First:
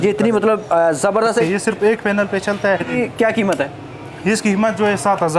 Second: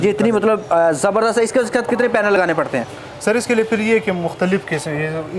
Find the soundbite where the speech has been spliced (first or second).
first